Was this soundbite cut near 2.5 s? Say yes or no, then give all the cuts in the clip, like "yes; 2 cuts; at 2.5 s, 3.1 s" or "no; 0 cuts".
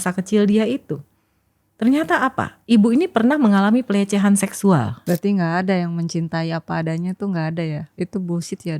no; 1 cut; at 5.0 s